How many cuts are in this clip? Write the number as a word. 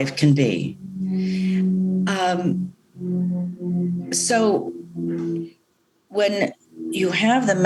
zero